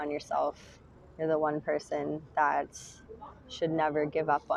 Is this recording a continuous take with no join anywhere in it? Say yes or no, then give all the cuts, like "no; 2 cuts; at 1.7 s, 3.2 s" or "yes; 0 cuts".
yes; 0 cuts